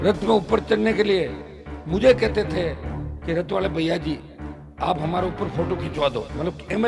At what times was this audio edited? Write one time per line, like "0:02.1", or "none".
none